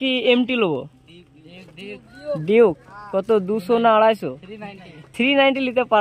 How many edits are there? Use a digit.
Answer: 0